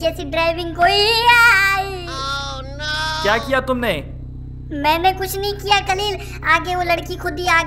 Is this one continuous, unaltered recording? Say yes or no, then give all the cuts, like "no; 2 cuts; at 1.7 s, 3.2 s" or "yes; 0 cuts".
yes; 0 cuts